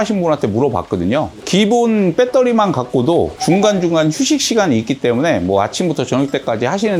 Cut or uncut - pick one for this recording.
uncut